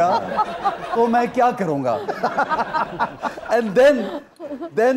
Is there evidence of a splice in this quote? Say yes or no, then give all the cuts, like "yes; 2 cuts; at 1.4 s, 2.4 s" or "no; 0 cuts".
no; 0 cuts